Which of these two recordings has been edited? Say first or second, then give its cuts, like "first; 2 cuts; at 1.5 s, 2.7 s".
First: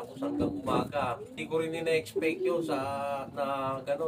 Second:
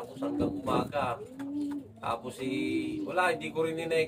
first; 1 cut; at 1.4 s